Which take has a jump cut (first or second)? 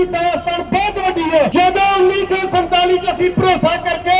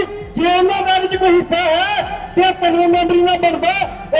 first